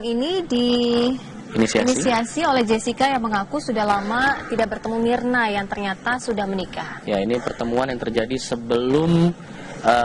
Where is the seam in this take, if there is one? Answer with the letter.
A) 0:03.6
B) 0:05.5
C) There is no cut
C